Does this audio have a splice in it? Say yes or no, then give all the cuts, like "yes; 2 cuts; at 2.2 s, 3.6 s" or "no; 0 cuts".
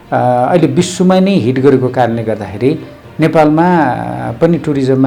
no; 0 cuts